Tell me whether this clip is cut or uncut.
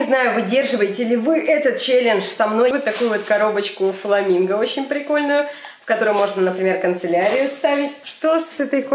cut